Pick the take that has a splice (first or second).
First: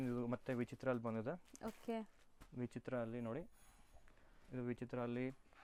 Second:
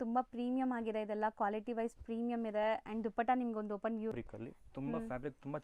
second